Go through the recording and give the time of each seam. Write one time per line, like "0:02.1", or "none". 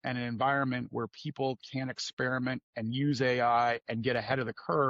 none